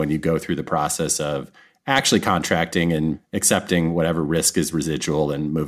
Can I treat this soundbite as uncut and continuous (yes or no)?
yes